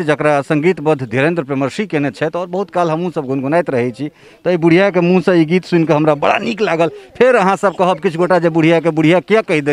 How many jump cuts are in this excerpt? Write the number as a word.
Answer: zero